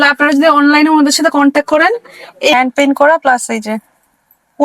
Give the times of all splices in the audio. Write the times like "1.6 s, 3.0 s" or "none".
2.5 s